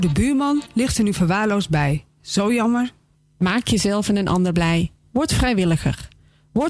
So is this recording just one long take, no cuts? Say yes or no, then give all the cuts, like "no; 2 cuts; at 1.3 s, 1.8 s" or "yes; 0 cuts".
yes; 0 cuts